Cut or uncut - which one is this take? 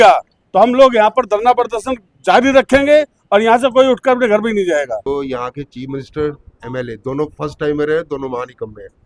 cut